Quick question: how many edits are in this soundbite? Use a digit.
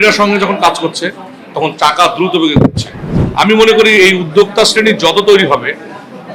1